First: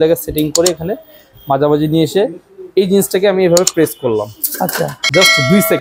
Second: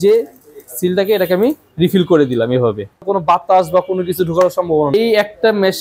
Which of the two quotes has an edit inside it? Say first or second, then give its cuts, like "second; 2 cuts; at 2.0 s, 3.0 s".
second; 2 cuts; at 3.0 s, 4.9 s